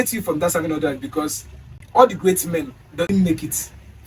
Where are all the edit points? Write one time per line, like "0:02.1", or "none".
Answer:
0:01.8
0:03.1